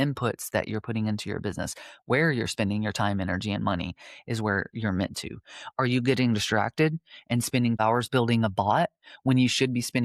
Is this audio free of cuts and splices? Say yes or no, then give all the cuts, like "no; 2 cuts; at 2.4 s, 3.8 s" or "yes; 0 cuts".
no; 1 cut; at 7.8 s